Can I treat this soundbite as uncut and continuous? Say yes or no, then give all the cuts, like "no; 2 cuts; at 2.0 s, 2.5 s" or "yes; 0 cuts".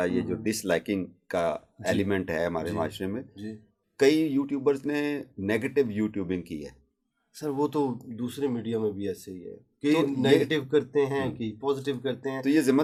yes; 0 cuts